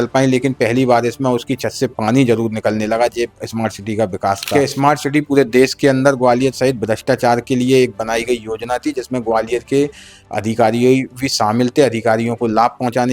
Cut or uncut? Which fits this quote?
cut